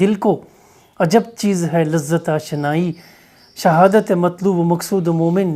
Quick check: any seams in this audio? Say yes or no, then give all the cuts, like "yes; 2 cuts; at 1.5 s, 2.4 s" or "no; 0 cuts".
no; 0 cuts